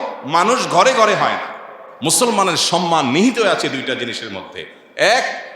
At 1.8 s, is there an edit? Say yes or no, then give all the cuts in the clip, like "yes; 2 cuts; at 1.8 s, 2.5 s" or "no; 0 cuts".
yes; 1 cut; at 1.8 s